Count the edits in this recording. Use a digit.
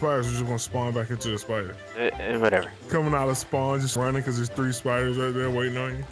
3